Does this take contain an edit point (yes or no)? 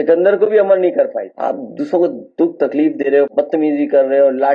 yes